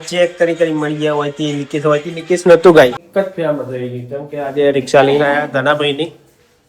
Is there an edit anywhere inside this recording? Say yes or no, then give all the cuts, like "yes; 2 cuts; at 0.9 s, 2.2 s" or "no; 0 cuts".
yes; 1 cut; at 3.0 s